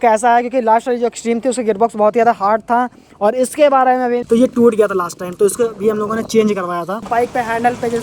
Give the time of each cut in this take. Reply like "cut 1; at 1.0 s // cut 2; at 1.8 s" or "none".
cut 1; at 4.2 s // cut 2; at 7.1 s